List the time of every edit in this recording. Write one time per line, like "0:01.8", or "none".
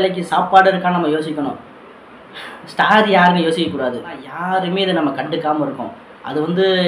0:04.3